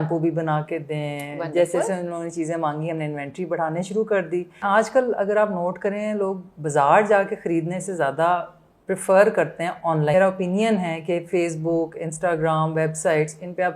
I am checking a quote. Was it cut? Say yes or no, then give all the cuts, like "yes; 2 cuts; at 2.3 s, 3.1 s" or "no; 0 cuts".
yes; 2 cuts; at 4.6 s, 10.1 s